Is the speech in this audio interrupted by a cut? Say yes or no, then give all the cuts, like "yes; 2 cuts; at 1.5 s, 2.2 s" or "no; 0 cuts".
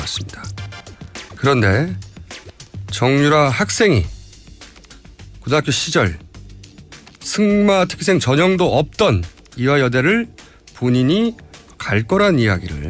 no; 0 cuts